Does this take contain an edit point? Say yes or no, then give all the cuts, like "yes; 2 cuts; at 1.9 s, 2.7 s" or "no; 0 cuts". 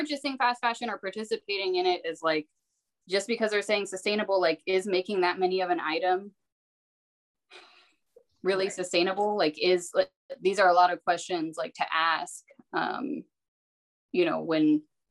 no; 0 cuts